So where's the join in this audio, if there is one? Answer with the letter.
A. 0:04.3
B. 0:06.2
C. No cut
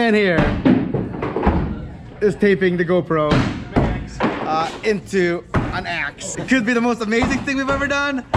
B